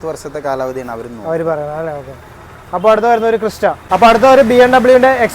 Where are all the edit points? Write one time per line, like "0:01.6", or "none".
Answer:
0:03.8

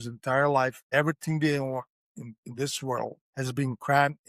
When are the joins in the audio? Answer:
0:00.8
0:03.2

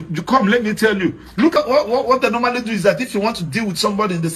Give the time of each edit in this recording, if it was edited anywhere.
0:01.6

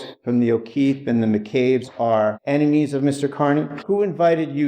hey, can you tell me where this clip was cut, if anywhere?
0:01.9
0:03.7

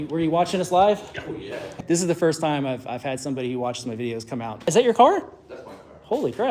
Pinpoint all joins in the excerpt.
0:01.8
0:04.7

